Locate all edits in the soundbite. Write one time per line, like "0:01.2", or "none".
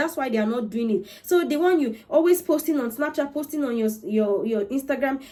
none